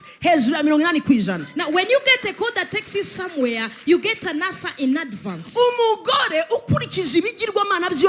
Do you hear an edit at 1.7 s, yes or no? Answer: no